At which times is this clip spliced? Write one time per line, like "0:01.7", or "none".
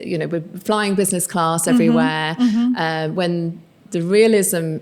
none